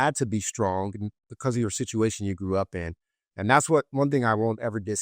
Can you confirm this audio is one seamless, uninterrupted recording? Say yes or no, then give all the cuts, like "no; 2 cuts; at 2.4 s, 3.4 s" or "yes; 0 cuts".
no; 1 cut; at 1.3 s